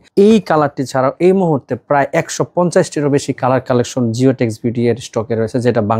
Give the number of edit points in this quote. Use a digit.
0